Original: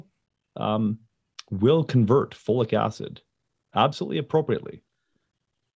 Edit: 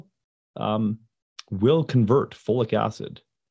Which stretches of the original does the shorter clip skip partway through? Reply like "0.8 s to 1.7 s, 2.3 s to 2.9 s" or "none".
none